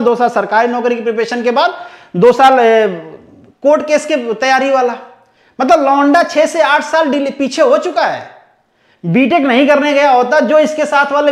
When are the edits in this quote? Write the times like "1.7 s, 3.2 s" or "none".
none